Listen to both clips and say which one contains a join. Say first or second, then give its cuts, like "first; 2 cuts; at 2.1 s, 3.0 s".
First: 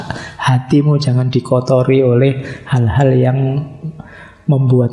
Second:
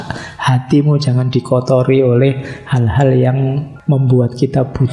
second; 1 cut; at 3.7 s